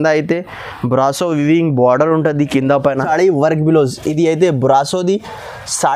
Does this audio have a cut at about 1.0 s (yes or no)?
no